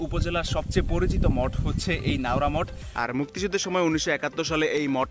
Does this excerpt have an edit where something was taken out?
yes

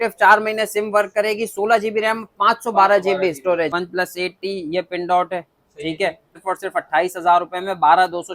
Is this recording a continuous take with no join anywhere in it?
no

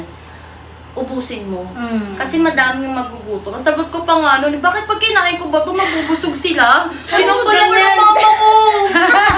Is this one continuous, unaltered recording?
yes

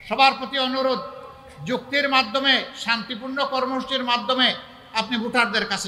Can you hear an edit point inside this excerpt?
no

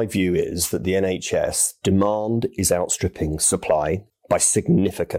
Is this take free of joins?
no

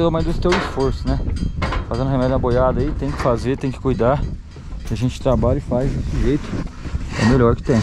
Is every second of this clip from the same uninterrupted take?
yes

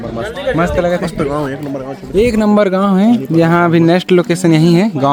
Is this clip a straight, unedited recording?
yes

